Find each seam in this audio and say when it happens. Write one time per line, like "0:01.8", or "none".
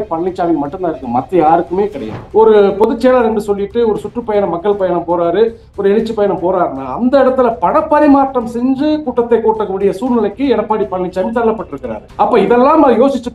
0:02.1